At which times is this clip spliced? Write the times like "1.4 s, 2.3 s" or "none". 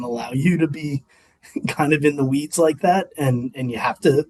none